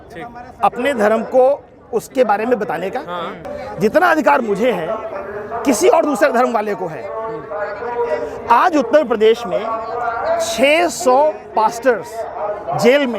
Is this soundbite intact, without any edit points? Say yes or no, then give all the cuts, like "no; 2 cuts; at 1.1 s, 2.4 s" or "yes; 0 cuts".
no; 1 cut; at 3.4 s